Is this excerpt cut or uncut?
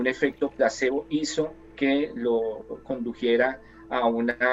uncut